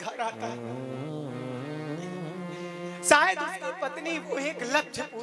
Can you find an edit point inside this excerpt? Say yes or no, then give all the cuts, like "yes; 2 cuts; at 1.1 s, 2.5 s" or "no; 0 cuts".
no; 0 cuts